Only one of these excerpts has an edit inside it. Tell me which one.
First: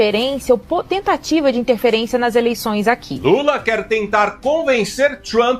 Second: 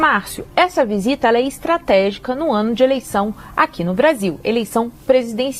first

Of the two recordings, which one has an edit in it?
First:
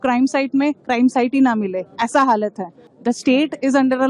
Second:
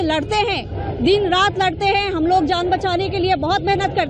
first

